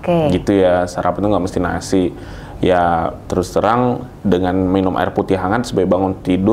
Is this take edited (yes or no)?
no